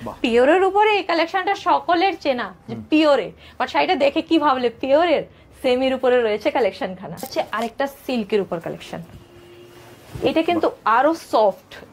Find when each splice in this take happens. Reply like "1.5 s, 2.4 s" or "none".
7.3 s